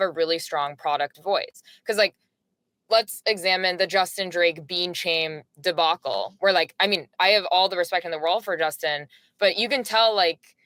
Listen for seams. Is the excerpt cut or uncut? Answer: uncut